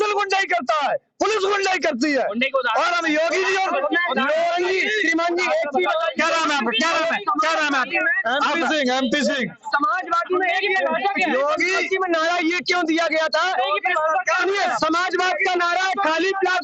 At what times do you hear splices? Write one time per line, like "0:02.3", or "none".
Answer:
none

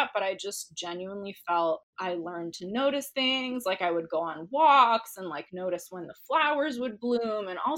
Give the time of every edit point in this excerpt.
0:01.9

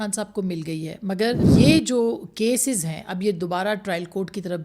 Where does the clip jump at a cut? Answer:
0:01.4

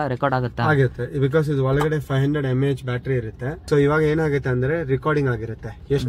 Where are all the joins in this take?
0:03.6

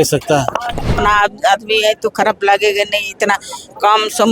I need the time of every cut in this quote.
0:00.9

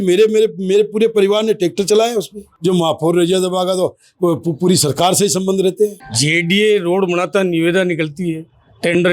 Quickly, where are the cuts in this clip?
0:02.5
0:06.1

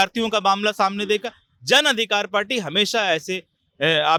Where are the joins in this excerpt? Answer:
none

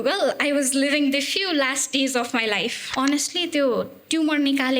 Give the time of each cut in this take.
0:02.8

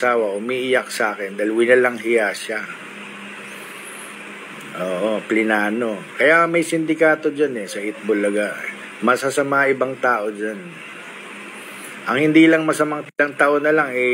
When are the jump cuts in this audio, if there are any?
0:13.0

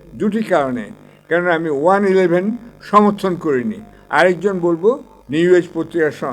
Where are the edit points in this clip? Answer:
0:05.1

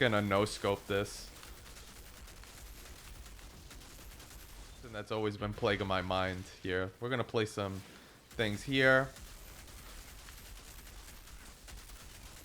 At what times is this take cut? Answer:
0:05.0

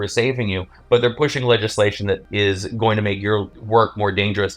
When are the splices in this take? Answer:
0:02.3
0:03.6

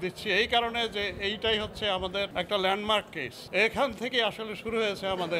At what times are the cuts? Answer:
0:03.3

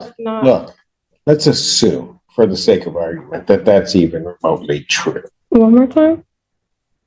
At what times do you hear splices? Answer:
0:05.3

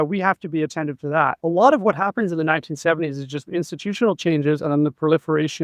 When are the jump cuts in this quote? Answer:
0:01.4

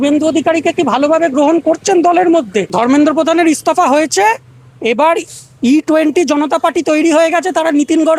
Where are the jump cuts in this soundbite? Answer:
0:02.7

